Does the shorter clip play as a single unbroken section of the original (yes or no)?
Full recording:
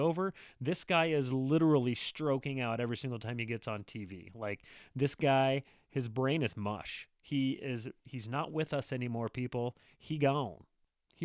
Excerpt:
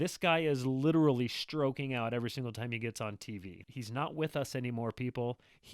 no